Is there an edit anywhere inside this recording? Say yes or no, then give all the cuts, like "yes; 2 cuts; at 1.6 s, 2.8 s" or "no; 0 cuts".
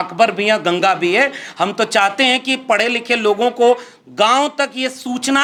no; 0 cuts